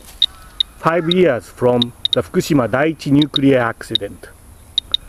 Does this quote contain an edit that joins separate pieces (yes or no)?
no